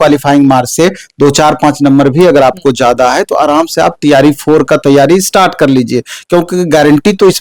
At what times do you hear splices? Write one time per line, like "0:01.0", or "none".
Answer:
none